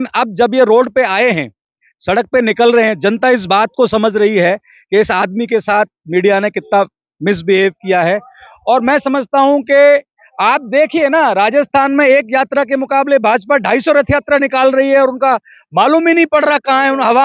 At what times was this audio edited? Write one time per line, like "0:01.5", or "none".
none